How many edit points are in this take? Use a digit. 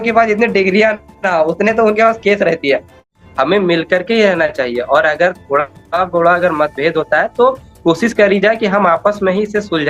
1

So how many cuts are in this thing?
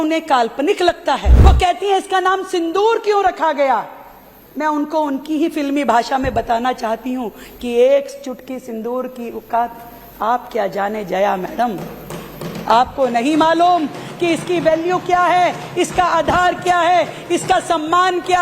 1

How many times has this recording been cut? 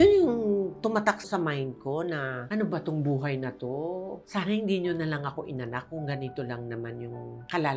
1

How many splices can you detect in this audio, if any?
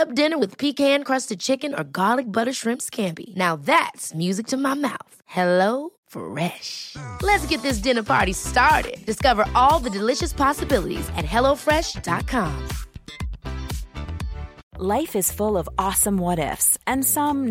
1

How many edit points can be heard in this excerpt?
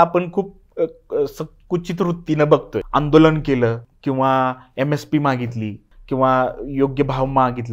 3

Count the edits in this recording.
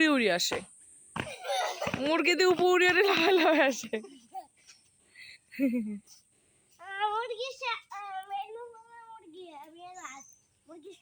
0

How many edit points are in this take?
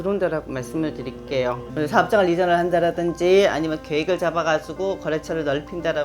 1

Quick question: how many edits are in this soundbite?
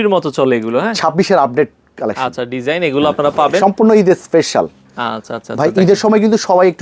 0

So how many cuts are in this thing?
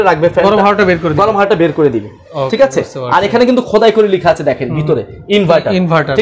0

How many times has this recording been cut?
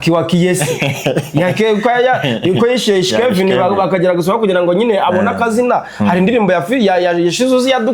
0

